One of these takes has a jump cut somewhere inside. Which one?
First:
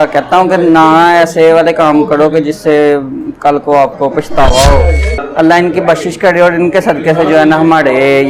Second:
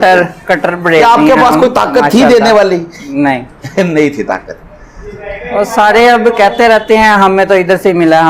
first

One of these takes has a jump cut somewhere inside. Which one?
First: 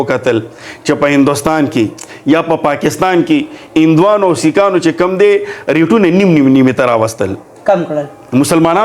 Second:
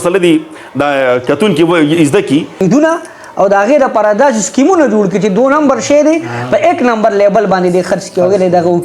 second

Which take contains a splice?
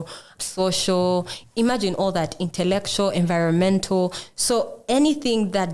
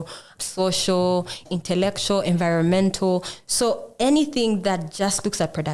second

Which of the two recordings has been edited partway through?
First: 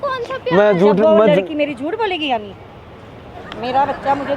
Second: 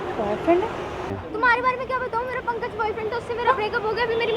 second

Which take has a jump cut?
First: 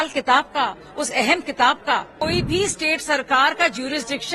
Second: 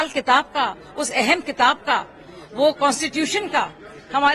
first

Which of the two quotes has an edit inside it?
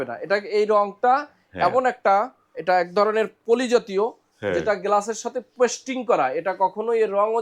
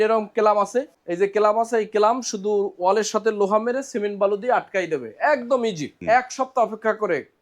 second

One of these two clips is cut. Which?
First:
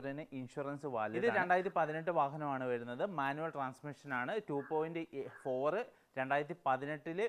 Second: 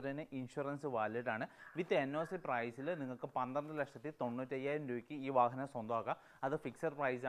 first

